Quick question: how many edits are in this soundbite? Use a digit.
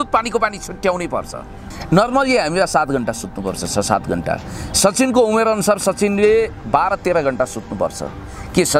1